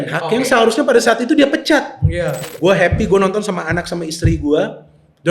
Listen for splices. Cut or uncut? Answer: cut